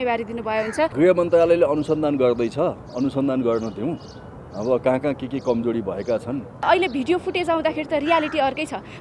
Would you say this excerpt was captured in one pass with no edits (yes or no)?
no